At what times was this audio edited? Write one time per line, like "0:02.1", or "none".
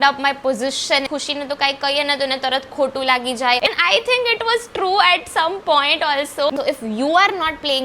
0:01.1
0:03.7
0:06.5